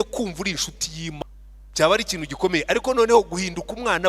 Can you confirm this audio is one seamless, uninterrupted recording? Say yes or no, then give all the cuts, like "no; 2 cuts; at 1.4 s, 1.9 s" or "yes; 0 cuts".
no; 1 cut; at 1.2 s